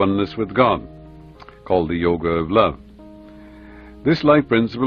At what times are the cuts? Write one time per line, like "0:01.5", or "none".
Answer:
0:01.3